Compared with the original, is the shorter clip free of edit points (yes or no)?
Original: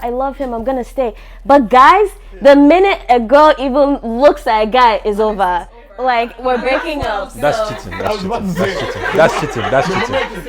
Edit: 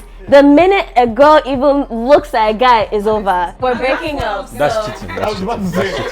no